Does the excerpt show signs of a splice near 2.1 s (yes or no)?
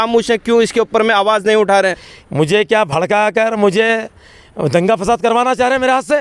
yes